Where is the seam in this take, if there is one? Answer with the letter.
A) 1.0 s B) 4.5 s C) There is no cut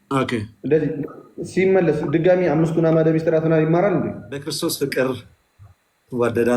B